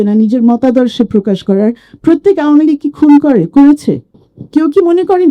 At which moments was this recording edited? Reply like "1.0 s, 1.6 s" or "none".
4.1 s